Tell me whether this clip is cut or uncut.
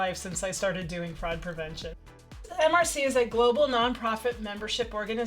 cut